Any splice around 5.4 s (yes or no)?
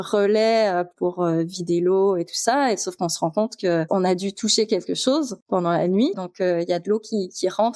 yes